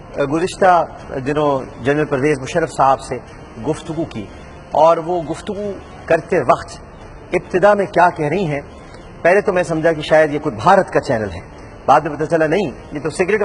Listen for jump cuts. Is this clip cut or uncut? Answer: cut